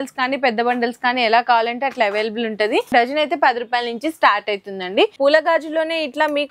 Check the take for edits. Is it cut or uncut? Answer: cut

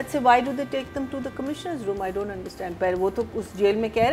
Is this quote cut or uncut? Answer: uncut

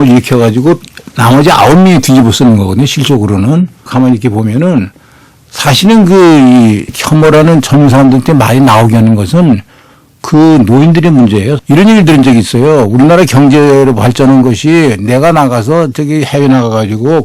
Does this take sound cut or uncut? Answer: cut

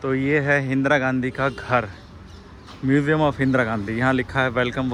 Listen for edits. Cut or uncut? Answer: uncut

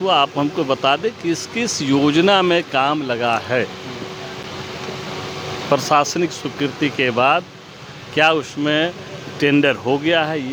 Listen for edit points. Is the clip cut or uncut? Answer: uncut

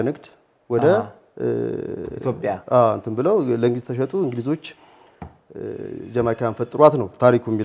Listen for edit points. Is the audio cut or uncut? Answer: uncut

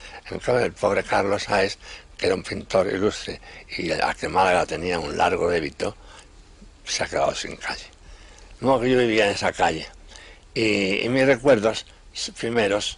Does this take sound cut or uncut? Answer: uncut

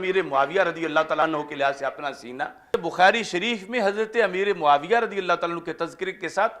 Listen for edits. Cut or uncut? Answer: cut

